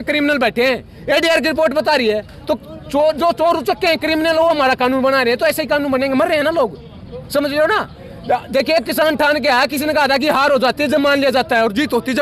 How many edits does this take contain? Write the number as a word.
zero